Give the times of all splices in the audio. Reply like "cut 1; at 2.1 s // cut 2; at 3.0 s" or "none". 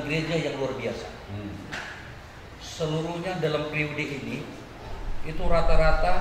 none